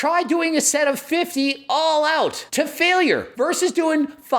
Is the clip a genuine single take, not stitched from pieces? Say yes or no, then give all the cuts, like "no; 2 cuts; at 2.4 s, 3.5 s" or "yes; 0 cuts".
no; 2 cuts; at 2.4 s, 3.3 s